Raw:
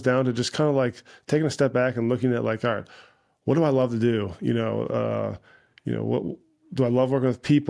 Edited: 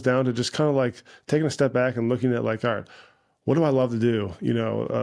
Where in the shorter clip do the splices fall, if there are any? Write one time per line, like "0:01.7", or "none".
none